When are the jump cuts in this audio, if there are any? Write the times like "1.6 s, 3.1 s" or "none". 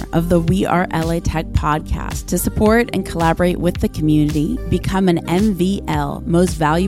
none